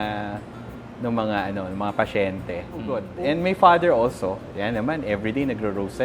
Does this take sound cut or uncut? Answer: cut